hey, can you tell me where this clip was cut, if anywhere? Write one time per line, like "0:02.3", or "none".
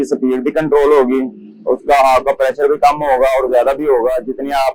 none